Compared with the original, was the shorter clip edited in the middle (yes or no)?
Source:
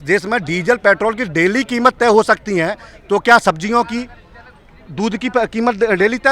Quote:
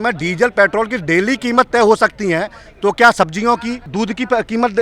yes